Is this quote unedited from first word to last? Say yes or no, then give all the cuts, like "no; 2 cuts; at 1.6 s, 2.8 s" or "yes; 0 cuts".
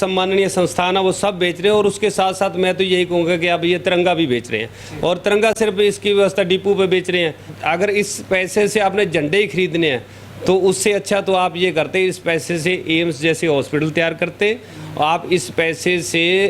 no; 1 cut; at 7.5 s